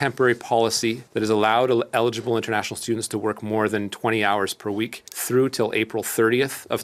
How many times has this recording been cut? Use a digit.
0